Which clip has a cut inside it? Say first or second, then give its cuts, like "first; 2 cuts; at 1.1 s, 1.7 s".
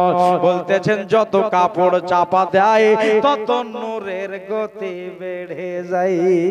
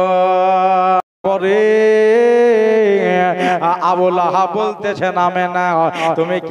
second; 1 cut; at 1.0 s